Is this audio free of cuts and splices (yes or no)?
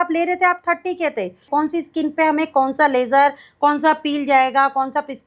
no